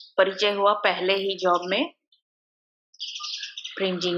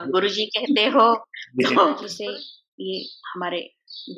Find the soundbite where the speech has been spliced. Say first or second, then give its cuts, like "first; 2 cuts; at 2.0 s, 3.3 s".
second; 1 cut; at 2.1 s